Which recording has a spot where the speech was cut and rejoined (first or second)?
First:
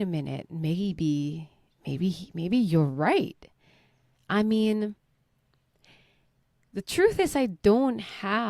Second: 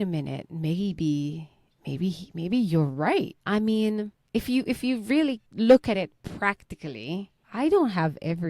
second